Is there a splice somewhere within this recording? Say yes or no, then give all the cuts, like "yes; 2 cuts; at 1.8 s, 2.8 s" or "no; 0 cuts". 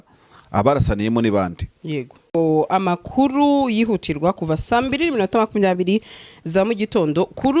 yes; 1 cut; at 2.3 s